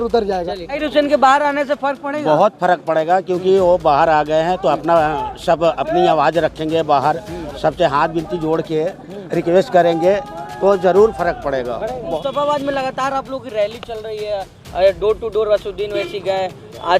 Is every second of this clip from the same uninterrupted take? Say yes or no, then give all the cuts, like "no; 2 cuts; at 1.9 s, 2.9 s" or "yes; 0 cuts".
no; 2 cuts; at 0.8 s, 11.9 s